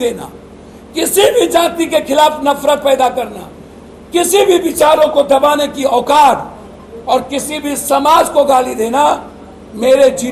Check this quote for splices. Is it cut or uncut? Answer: uncut